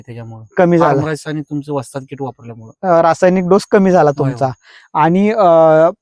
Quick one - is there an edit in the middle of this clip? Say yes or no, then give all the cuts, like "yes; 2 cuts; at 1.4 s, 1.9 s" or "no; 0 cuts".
no; 0 cuts